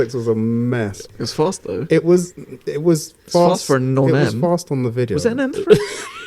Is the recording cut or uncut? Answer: cut